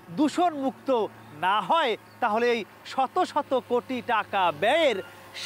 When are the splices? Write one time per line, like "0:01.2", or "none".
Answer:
none